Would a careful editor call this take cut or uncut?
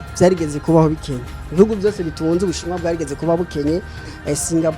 uncut